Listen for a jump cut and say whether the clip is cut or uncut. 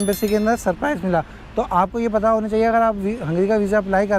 uncut